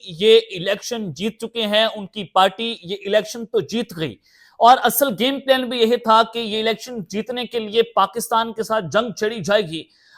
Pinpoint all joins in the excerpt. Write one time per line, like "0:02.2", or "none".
none